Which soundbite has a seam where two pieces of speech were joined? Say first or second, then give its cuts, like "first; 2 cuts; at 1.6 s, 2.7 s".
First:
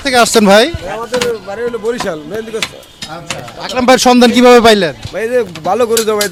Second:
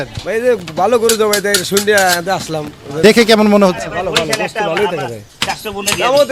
second; 1 cut; at 3.0 s